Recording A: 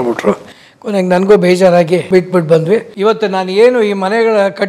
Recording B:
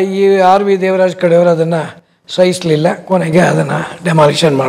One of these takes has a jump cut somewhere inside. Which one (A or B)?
A